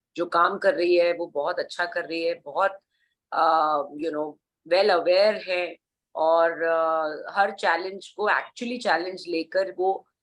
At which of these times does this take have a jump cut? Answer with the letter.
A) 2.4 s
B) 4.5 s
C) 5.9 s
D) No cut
D